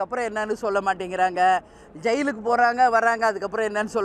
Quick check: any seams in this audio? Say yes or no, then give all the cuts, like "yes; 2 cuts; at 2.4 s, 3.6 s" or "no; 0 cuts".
no; 0 cuts